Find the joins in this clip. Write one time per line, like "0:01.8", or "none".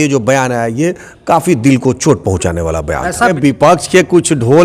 0:03.3

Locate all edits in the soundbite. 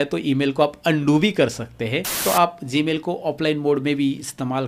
0:02.2

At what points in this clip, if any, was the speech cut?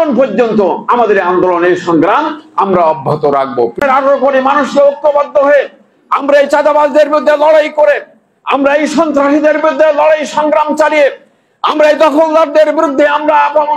0:03.8

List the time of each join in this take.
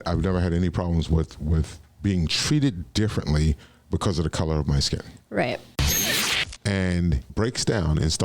0:06.1
0:07.2

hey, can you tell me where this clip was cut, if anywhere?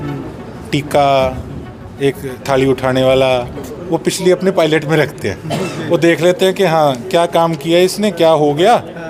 none

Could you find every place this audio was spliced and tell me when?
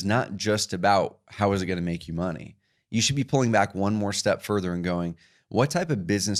none

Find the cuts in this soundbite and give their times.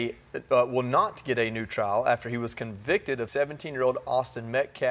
0:03.3

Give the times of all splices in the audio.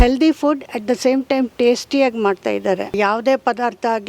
0:02.9

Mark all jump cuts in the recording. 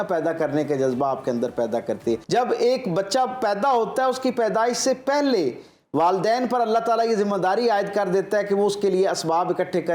0:02.2

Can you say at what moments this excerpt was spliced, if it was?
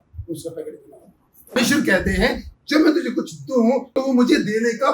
0:01.6
0:03.9

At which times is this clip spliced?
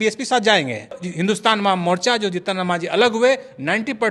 0:01.0

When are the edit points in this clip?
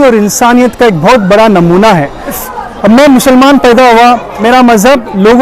0:02.4
0:04.4

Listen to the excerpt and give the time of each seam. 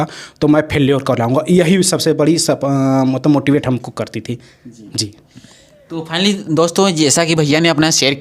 none

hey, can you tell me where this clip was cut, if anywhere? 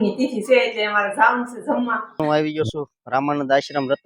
0:02.2

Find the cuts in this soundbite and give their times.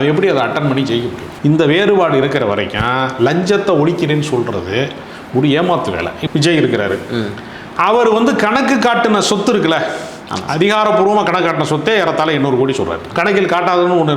0:01.2
0:06.2
0:13.0

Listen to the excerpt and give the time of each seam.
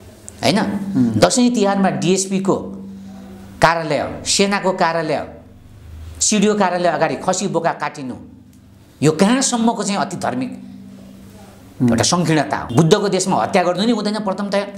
0:12.7

